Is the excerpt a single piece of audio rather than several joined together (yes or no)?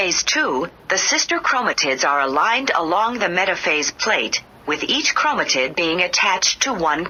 yes